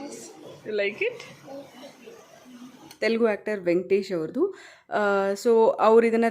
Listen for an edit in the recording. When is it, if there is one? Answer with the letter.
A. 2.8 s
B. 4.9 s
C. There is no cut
A